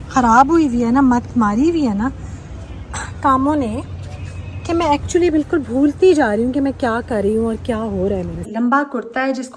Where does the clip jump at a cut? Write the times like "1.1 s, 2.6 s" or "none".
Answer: 8.5 s